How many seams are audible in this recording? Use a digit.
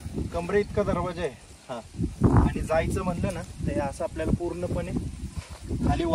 0